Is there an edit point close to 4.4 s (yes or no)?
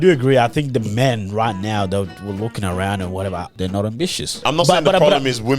yes